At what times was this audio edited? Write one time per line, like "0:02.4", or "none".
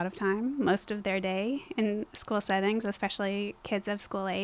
none